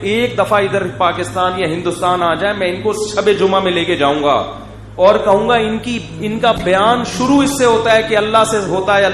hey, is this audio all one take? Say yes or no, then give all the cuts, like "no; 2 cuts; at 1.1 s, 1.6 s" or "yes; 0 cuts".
yes; 0 cuts